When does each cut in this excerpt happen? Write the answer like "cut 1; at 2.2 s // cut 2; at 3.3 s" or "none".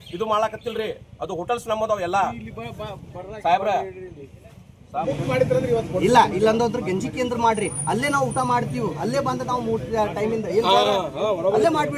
cut 1; at 5.0 s